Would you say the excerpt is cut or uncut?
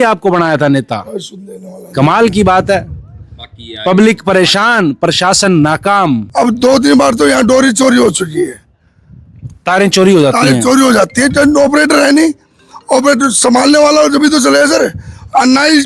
cut